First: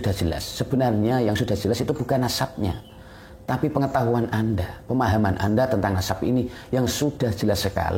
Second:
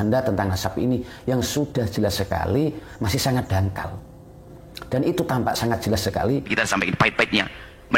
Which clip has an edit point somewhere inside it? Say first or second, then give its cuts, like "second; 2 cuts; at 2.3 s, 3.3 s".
second; 1 cut; at 6.5 s